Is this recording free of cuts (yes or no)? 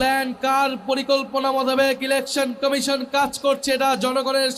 yes